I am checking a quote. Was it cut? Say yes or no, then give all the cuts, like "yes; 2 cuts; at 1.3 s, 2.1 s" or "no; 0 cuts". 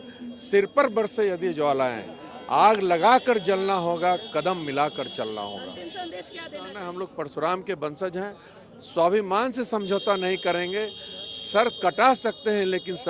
yes; 1 cut; at 6.8 s